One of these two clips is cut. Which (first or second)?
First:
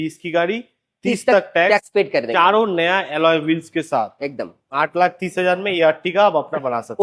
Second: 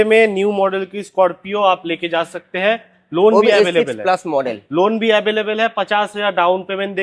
first